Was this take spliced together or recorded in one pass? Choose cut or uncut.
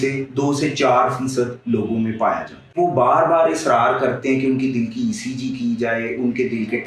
cut